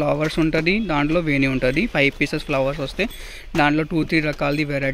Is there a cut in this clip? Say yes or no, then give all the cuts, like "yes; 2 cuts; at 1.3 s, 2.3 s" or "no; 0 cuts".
no; 0 cuts